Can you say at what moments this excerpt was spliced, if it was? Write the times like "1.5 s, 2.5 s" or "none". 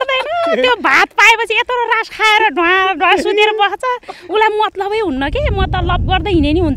none